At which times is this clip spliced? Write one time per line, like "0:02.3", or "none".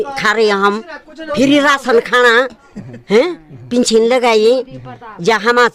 0:01.2